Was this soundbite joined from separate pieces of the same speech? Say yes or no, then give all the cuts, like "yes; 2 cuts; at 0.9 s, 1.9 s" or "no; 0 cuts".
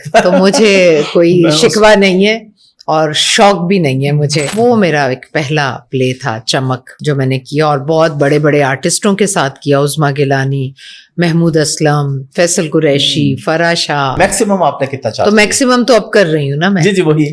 yes; 3 cuts; at 4.5 s, 6.9 s, 14.1 s